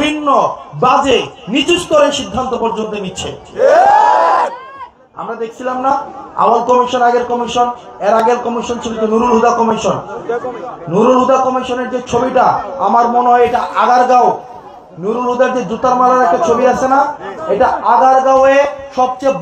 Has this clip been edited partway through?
no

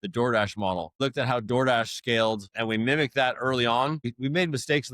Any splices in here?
yes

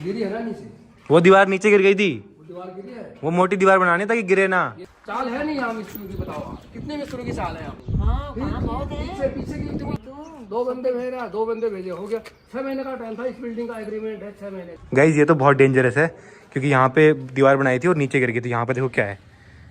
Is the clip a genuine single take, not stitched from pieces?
no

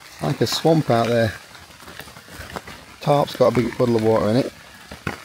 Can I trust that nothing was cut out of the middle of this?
yes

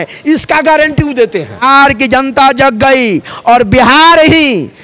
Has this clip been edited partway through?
yes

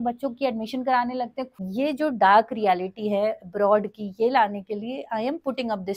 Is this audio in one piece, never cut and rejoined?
no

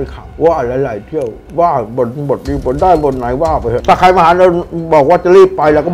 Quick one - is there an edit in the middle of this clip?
yes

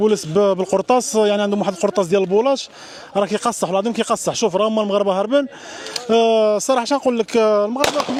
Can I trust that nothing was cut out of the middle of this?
yes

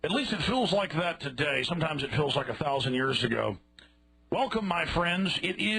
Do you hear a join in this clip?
yes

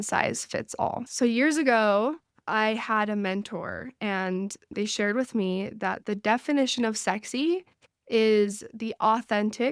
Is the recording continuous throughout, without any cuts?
no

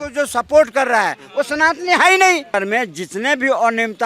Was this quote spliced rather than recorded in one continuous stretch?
yes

